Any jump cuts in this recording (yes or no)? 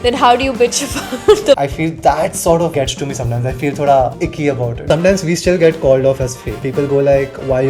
yes